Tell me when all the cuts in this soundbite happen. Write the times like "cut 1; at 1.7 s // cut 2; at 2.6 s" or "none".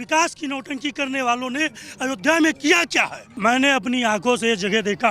cut 1; at 3.2 s